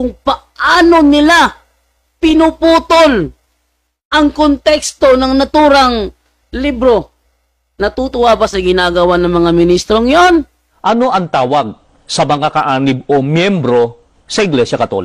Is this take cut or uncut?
cut